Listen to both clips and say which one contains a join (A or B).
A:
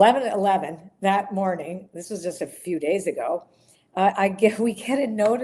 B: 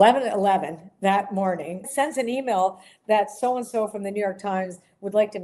B